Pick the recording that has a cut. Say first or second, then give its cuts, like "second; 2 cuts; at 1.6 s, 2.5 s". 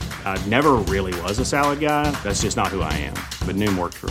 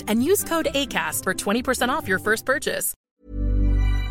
second; 1 cut; at 2.9 s